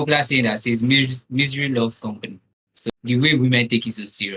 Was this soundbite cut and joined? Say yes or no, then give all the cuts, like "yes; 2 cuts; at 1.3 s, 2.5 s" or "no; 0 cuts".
yes; 1 cut; at 2.9 s